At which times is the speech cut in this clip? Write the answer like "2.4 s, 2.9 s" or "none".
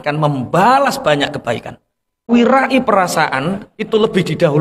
2.3 s